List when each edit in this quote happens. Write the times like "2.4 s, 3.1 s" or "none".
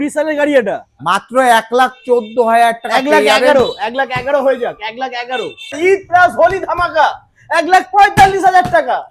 1.0 s, 5.8 s